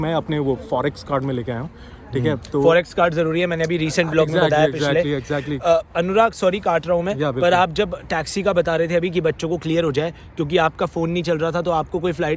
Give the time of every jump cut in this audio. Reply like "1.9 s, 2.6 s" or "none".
none